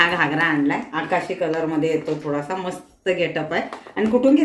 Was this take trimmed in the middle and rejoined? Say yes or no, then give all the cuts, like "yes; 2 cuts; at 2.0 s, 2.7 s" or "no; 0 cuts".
no; 0 cuts